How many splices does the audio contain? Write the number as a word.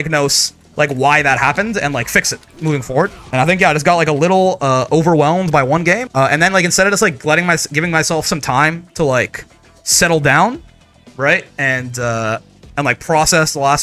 two